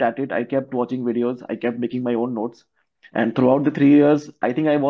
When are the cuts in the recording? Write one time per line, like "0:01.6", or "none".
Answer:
none